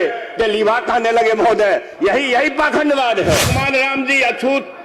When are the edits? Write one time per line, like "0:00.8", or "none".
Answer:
0:03.6